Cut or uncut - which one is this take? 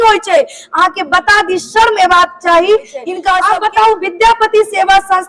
cut